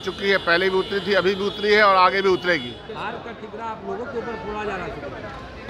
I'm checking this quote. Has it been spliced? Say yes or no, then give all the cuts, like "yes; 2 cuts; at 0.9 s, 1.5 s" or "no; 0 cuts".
yes; 1 cut; at 2.8 s